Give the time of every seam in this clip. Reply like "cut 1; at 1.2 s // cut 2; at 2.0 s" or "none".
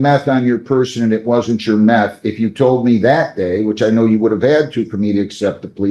none